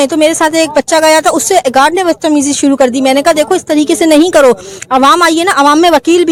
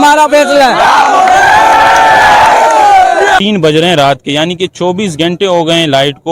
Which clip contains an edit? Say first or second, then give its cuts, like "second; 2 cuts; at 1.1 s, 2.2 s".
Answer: second; 1 cut; at 3.4 s